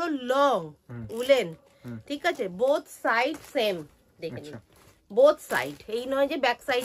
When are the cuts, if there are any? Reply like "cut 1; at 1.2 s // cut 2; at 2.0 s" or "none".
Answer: none